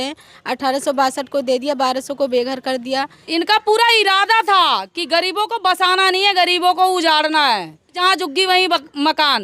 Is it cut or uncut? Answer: cut